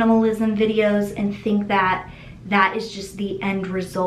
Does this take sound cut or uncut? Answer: uncut